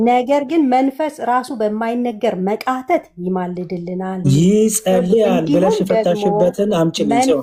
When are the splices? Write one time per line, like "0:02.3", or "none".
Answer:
none